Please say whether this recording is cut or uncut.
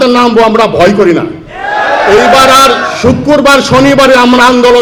uncut